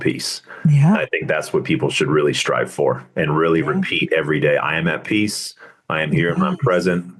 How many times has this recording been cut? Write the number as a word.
zero